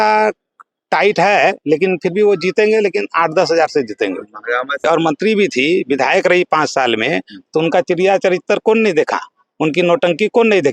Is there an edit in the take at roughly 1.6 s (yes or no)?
no